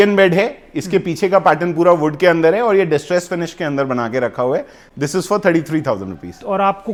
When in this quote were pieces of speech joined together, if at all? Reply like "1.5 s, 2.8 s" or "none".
none